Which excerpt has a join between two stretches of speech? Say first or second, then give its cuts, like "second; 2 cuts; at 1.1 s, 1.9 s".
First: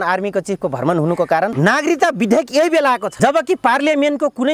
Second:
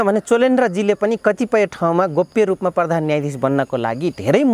first; 2 cuts; at 1.5 s, 3.1 s